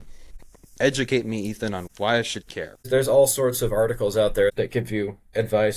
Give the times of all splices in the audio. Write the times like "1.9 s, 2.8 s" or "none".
1.8 s, 2.9 s, 4.5 s